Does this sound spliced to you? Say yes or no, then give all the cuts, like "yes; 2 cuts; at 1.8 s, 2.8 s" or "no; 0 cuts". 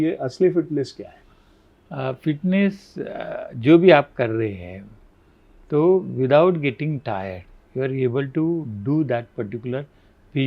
no; 0 cuts